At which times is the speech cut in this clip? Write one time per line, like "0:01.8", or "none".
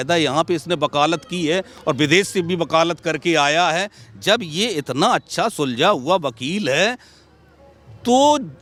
none